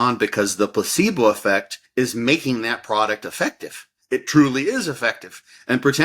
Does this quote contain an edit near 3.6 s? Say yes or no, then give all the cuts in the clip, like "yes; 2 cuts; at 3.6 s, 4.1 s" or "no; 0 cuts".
no; 1 cut; at 1.8 s